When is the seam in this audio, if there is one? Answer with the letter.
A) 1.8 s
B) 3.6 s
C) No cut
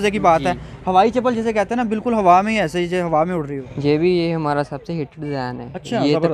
B